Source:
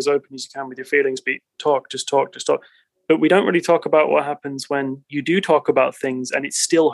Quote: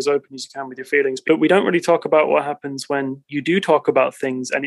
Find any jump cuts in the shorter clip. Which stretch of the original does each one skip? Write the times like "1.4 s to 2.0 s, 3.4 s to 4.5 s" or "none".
1.2 s to 3.0 s